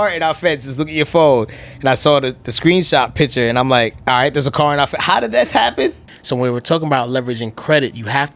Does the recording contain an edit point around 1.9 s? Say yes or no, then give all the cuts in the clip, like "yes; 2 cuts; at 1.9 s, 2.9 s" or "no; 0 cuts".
no; 2 cuts; at 4.0 s, 6.1 s